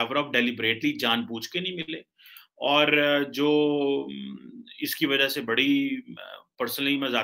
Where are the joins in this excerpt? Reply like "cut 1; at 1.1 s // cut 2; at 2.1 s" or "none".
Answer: none